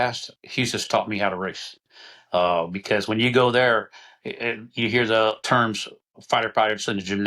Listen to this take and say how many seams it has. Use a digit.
1